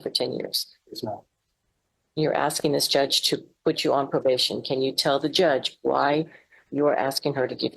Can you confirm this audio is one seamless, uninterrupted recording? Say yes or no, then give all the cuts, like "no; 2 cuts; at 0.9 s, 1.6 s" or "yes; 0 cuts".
yes; 0 cuts